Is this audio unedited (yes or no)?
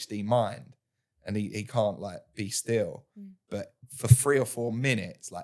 yes